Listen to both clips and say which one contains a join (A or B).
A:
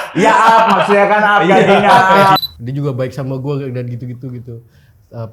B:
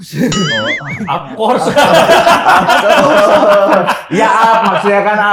A